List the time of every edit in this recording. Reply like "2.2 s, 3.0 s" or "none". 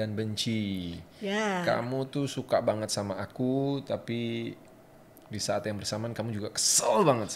none